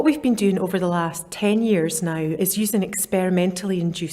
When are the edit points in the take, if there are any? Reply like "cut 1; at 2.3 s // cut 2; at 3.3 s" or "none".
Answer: cut 1; at 1.2 s // cut 2; at 2.3 s